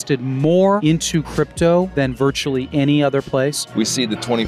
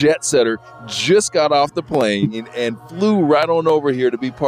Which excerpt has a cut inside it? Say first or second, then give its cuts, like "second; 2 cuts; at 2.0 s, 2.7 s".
first; 3 cuts; at 1.0 s, 2.3 s, 3.6 s